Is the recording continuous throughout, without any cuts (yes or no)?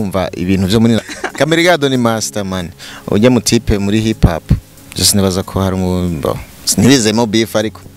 no